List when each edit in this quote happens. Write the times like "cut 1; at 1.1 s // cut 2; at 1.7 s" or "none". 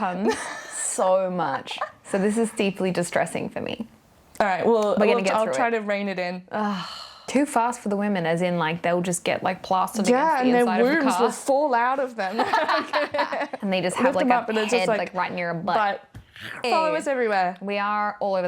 cut 1; at 7.3 s // cut 2; at 13.6 s // cut 3; at 16.6 s